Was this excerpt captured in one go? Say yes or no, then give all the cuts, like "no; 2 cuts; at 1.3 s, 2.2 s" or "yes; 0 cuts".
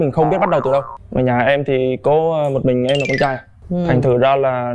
no; 1 cut; at 1.0 s